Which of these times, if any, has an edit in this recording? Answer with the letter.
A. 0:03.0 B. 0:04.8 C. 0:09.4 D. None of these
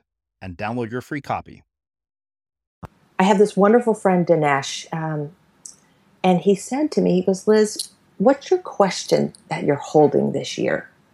A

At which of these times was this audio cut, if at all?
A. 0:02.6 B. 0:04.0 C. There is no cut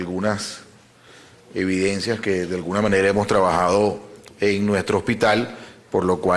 B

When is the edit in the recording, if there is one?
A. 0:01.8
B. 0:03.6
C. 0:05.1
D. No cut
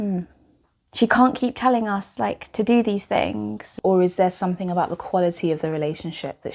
B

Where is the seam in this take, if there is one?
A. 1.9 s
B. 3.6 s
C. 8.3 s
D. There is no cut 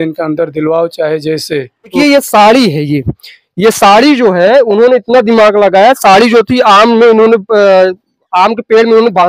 A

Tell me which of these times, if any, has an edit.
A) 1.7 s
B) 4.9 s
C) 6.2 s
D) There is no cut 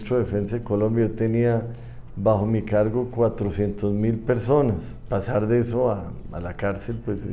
B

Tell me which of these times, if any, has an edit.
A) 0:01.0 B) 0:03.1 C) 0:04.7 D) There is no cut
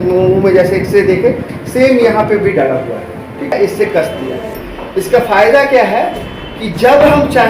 D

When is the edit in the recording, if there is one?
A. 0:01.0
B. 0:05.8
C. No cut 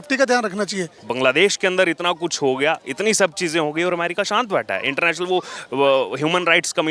A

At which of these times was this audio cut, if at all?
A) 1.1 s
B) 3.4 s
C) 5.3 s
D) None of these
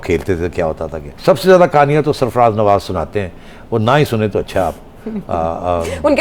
A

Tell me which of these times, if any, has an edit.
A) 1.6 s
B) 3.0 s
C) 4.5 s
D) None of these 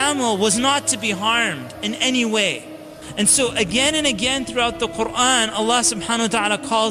B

